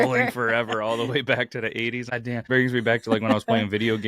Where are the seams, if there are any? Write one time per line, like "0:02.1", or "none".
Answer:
0:02.2